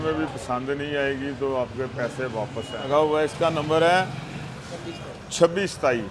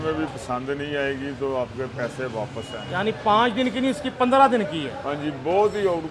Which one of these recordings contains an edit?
first; 1 cut; at 2.9 s

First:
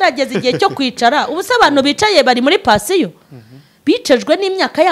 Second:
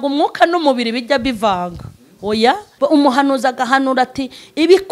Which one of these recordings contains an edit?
second; 1 cut; at 2.7 s

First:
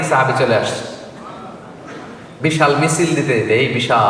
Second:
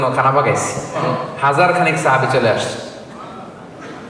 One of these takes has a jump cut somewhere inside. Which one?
second; 1 cut; at 1.0 s

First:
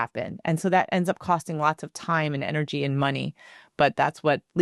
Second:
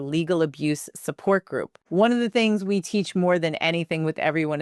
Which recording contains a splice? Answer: second; 1 cut; at 1.8 s

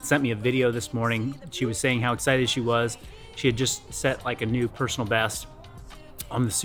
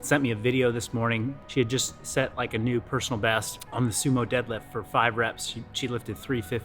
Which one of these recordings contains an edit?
second; 2 cuts; at 1.4 s, 3.6 s

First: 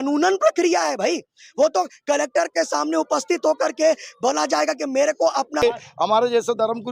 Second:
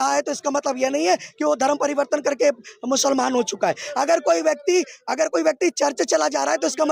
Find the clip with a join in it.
first; 1 cut; at 5.6 s

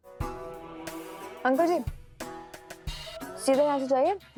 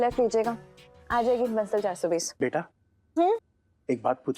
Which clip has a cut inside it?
second; 1 cut; at 2.3 s

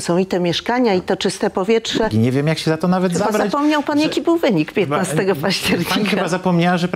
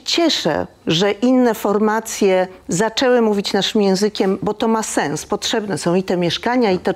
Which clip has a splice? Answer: first; 1 cut; at 2.1 s

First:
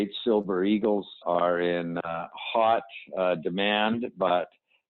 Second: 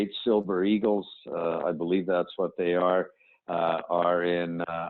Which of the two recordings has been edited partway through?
first; 1 cut; at 1.2 s

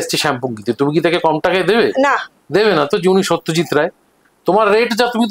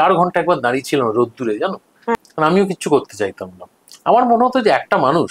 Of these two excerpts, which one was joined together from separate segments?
second; 1 cut; at 2.2 s

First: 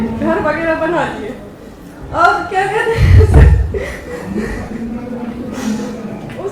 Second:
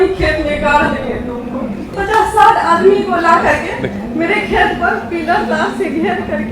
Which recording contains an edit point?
second; 1 cut; at 1.9 s

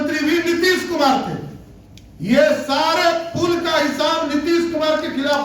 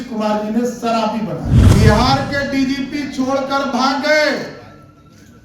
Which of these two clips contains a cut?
second; 1 cut; at 1.6 s

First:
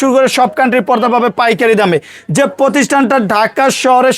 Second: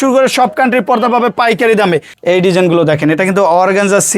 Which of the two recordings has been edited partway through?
second; 1 cut; at 2.1 s

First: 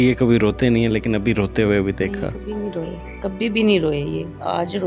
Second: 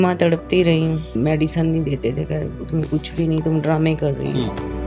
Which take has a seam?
second; 1 cut; at 1.1 s

